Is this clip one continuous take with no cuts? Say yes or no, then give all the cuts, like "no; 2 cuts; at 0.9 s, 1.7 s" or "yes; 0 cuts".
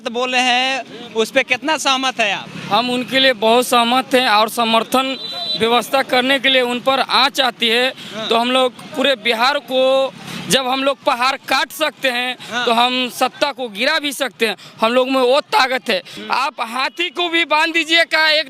no; 1 cut; at 16.1 s